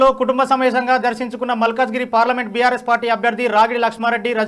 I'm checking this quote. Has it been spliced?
no; 0 cuts

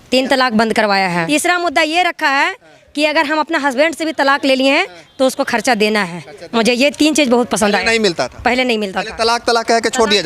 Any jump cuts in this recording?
yes; 1 cut; at 1.2 s

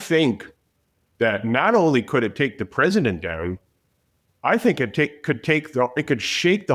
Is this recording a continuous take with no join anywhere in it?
yes; 0 cuts

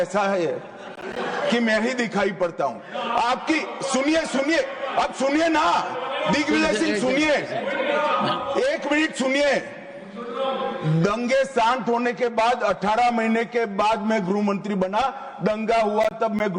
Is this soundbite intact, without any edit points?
yes; 0 cuts

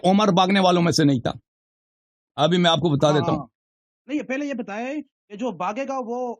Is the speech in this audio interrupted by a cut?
no; 0 cuts

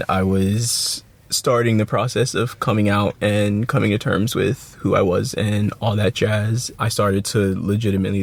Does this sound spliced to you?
no; 0 cuts

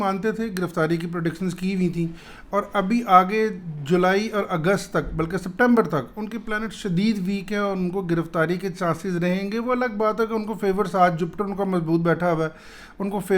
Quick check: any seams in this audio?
no; 0 cuts

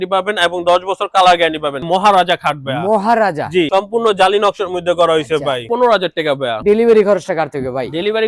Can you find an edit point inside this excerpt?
yes; 3 cuts; at 1.9 s, 3.7 s, 5.9 s

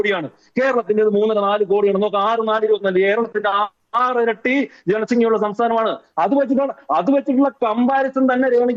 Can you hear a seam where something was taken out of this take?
no; 0 cuts

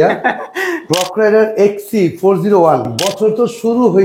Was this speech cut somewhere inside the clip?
yes; 2 cuts; at 0.9 s, 3.0 s

